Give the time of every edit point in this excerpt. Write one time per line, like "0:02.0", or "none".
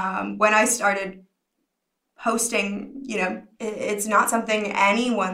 0:03.5